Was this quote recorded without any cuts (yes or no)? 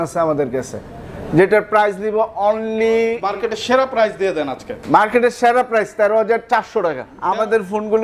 no